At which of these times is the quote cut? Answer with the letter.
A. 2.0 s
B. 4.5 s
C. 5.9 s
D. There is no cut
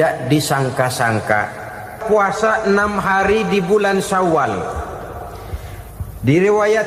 A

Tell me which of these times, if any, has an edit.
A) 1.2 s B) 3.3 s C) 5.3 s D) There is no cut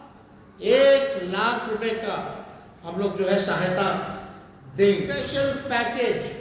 C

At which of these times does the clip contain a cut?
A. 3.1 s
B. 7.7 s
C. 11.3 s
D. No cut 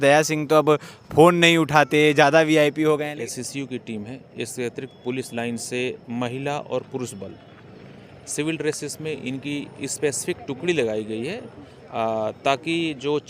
A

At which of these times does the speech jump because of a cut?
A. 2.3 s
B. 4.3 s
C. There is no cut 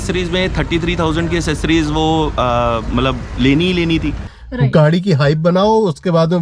B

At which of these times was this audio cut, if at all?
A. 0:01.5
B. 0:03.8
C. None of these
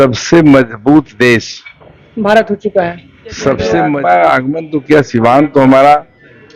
B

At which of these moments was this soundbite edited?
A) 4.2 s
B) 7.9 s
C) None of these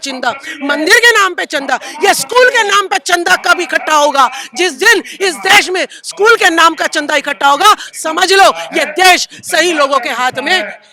C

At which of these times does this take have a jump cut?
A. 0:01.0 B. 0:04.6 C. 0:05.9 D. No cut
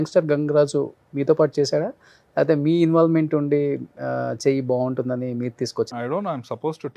C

